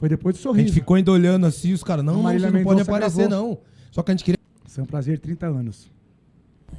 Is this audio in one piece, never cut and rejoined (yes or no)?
no